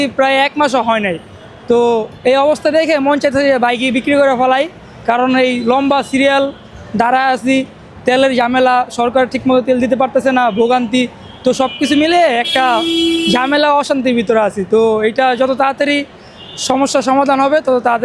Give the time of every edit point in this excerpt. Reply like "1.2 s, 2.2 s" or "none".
none

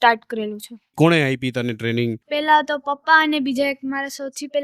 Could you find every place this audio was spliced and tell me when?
0.9 s

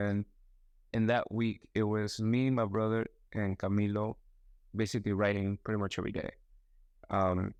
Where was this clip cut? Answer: none

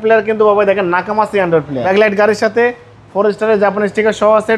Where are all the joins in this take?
1.8 s

